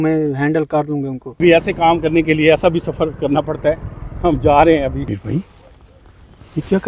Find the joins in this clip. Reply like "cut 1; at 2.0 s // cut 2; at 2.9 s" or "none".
cut 1; at 1.2 s // cut 2; at 5.1 s